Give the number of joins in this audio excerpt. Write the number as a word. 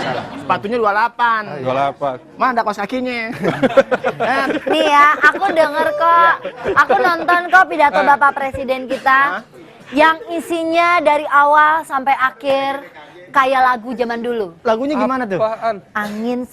one